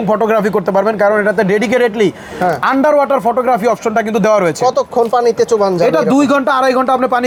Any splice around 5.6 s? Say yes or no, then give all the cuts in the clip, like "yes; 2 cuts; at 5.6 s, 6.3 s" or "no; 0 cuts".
no; 0 cuts